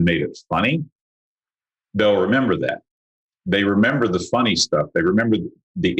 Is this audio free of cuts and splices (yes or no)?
yes